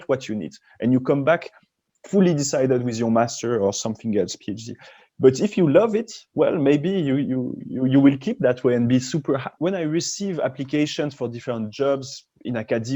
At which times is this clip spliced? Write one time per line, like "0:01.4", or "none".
0:09.5